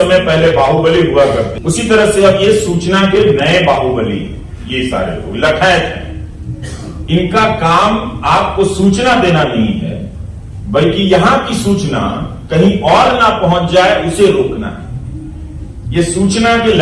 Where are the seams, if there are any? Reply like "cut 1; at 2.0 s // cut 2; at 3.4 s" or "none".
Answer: cut 1; at 1.5 s